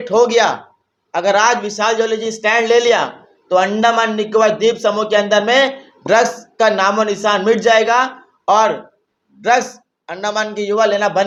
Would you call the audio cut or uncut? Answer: uncut